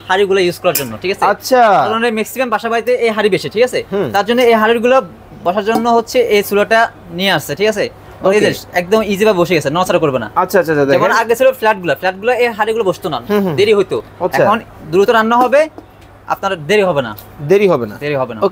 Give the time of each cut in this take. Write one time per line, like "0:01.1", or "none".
none